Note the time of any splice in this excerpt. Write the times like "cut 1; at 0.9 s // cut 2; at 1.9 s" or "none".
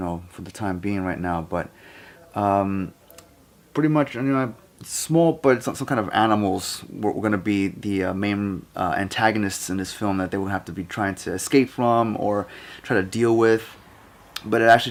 none